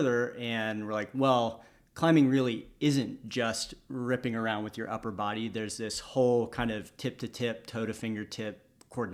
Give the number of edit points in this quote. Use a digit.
0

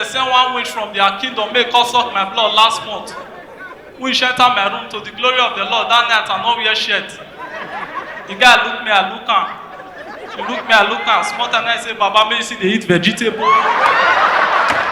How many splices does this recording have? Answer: 0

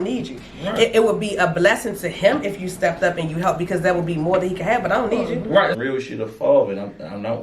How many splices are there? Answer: 1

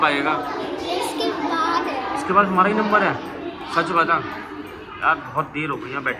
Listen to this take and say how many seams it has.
0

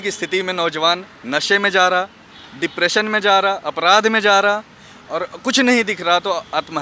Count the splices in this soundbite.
0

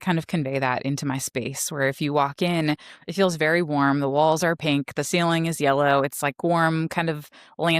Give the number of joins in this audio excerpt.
0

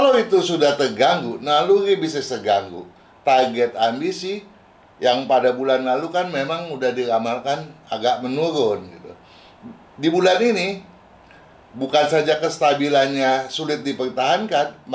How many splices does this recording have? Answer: 0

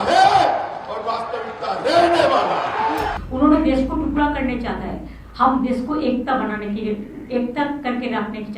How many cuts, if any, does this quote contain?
1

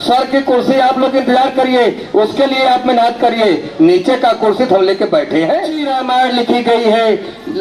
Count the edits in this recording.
1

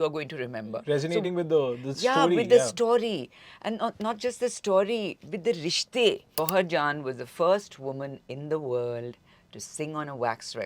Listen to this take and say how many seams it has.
1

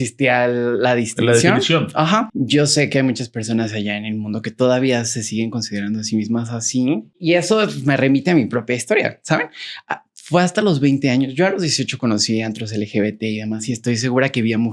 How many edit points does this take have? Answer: 2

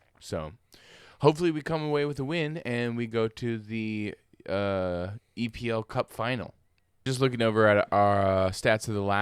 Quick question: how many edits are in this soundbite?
1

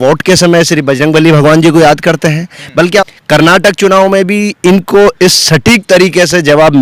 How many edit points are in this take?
1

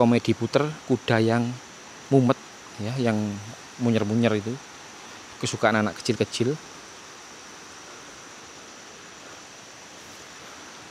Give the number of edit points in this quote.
0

